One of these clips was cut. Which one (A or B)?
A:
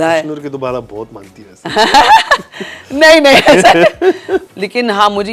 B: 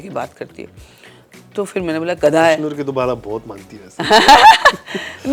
A